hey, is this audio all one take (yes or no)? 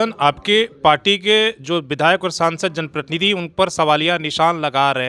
yes